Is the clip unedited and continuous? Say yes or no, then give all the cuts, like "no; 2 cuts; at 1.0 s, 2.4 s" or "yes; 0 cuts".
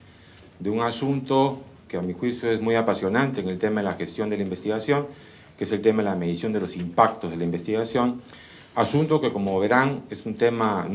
no; 1 cut; at 6.5 s